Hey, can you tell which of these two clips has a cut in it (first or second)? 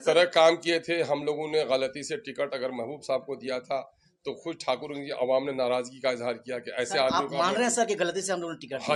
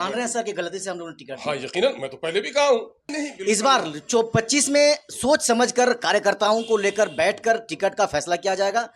second